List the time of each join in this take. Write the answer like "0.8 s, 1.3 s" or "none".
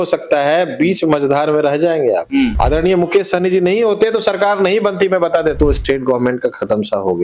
2.5 s, 5.6 s

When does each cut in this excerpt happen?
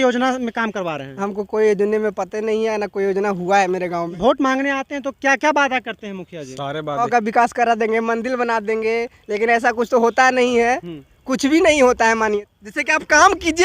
4.1 s, 7.1 s, 12.4 s

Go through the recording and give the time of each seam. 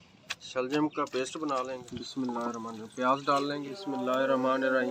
1.8 s, 3.7 s

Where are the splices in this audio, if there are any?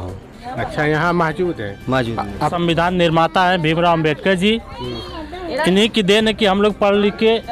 2.5 s

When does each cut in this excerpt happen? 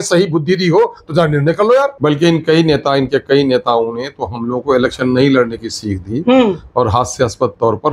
1.9 s

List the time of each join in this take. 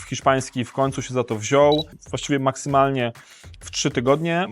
1.9 s

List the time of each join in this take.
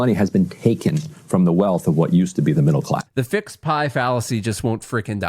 3.1 s

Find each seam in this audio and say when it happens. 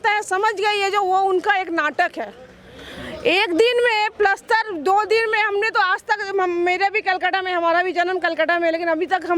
none

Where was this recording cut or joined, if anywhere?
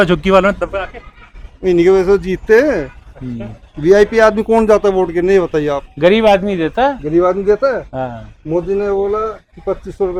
none

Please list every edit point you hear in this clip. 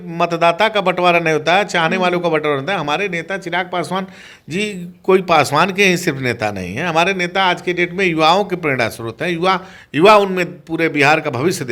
none

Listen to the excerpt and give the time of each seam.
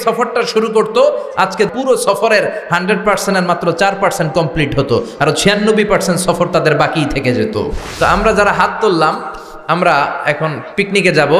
1.7 s, 7.8 s

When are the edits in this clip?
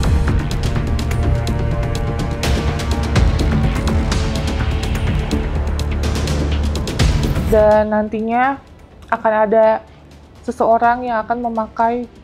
7.4 s

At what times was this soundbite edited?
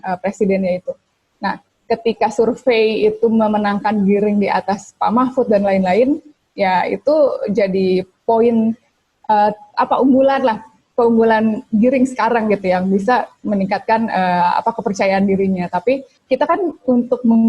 16.1 s

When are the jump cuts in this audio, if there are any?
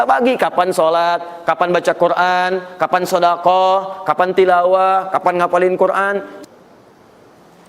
6.3 s

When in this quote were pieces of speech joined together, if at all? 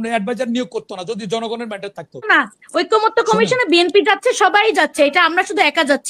2.3 s

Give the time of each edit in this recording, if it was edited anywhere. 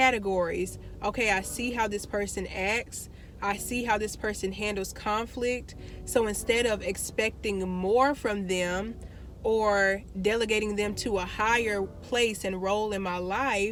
none

